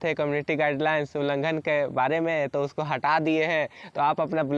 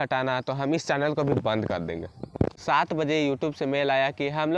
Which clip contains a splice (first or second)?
second